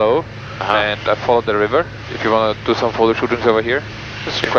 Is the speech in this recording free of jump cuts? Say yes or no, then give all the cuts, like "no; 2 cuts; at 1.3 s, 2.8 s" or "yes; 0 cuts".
no; 1 cut; at 2.1 s